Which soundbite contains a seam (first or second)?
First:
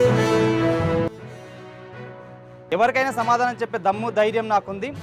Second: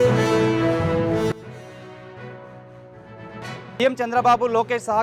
first